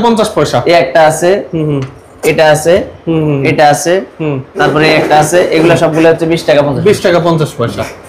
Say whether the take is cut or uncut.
uncut